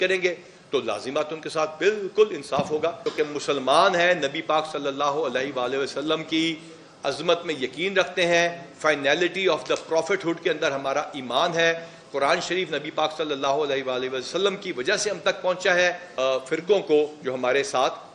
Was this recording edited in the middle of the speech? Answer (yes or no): yes